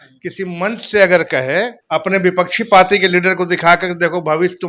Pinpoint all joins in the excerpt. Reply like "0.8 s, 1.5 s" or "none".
1.8 s